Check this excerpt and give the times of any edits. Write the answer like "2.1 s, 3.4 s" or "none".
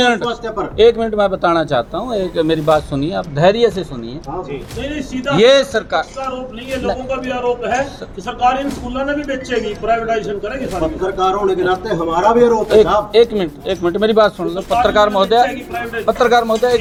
none